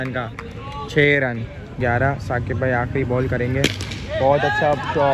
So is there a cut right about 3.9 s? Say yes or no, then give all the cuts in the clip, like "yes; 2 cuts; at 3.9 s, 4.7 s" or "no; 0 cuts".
no; 1 cut; at 1.8 s